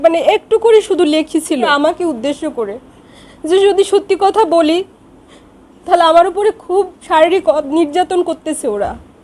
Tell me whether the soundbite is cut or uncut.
cut